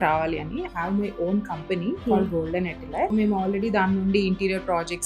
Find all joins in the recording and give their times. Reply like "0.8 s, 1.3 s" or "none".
2.0 s, 3.1 s

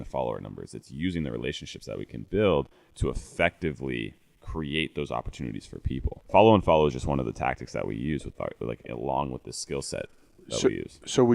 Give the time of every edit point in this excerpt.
6.2 s

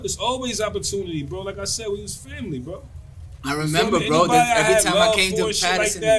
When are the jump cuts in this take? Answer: none

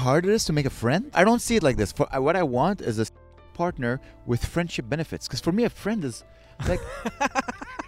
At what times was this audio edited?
1.1 s

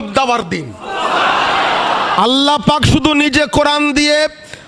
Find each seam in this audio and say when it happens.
2.2 s

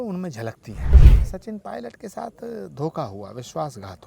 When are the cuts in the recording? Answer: 0.9 s

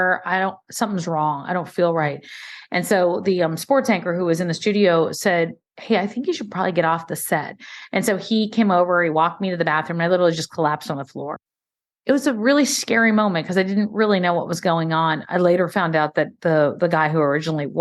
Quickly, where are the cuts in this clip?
11.7 s

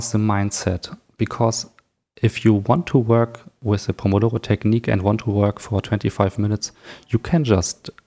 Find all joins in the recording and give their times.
none

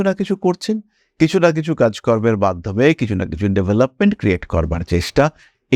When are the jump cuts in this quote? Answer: none

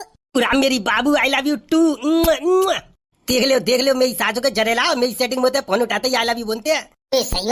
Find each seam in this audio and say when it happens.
none

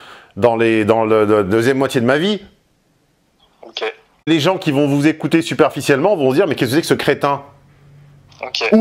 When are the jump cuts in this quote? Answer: 4.3 s

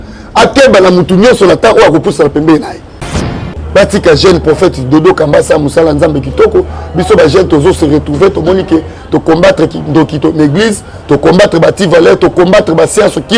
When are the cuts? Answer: 3.2 s

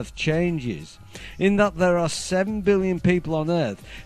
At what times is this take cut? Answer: 1.1 s

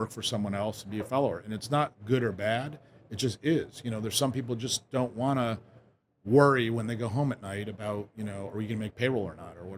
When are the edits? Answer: none

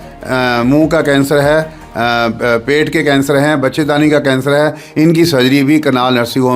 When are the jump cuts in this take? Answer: none

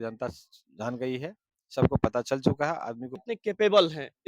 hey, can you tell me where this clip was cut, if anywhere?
3.1 s

